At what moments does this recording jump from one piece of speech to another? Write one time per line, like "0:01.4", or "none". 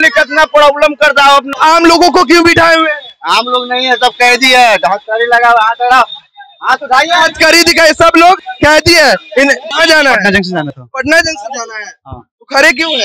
0:01.5
0:09.7